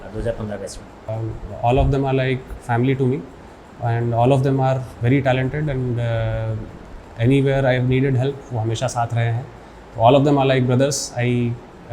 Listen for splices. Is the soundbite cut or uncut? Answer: cut